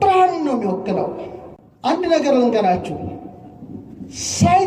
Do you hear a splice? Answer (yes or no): no